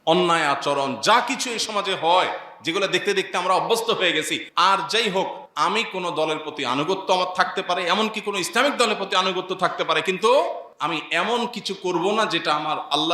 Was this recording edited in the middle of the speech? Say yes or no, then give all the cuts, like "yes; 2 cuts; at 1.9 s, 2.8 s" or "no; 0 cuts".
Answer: yes; 3 cuts; at 4.4 s, 5.4 s, 10.7 s